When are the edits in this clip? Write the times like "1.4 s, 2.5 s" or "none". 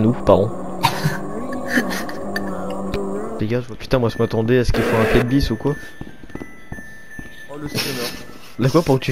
3.2 s